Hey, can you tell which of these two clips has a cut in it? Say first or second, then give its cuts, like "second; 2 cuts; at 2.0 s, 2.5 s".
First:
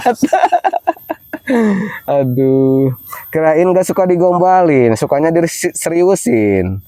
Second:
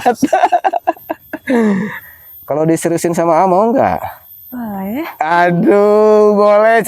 second; 1 cut; at 1.9 s